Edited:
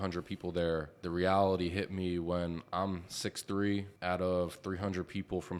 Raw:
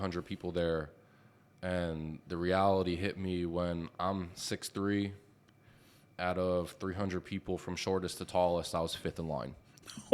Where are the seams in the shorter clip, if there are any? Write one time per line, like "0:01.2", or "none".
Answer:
0:01.0
0:03.9

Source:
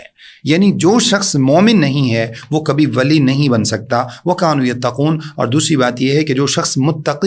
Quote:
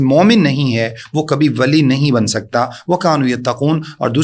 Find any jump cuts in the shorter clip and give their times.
none

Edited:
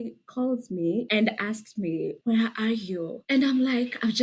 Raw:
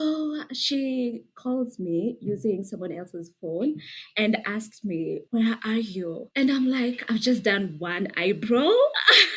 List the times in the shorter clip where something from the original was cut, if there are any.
0:01.1

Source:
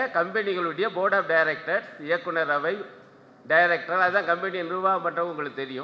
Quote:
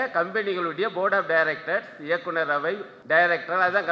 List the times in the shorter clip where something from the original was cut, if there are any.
0:02.9

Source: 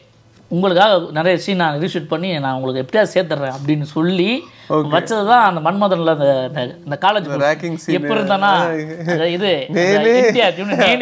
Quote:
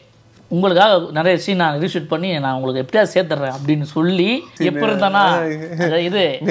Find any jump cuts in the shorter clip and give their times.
0:04.5

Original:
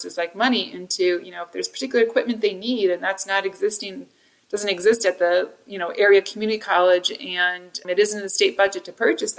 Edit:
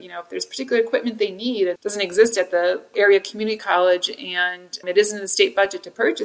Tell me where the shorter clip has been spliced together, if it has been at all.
0:01.8
0:02.9

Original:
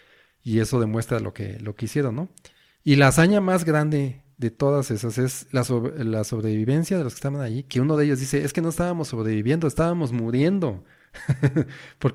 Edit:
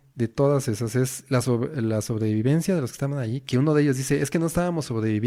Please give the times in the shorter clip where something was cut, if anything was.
none

